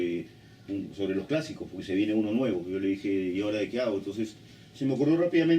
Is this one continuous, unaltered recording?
no; 1 cut; at 3.5 s

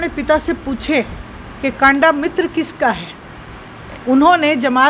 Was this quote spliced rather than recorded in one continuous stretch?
no; 0 cuts

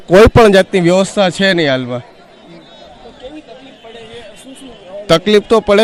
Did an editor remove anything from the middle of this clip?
no; 0 cuts

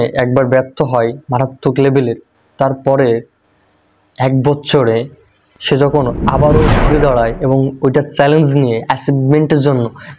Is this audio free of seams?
yes; 0 cuts

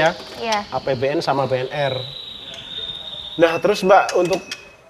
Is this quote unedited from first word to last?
yes; 0 cuts

